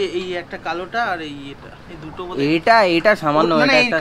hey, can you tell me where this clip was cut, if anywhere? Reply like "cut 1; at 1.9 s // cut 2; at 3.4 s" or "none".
none